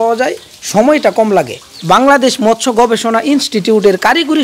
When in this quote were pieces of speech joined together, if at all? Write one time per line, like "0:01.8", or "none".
0:01.7